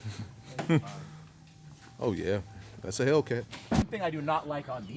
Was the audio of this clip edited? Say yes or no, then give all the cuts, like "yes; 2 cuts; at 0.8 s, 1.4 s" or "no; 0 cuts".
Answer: yes; 1 cut; at 3.8 s